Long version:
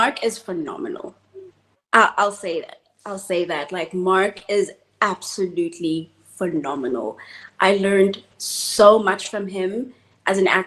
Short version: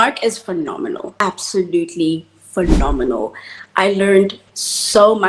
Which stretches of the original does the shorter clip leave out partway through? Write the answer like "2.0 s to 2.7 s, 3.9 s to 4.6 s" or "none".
1.2 s to 5.1 s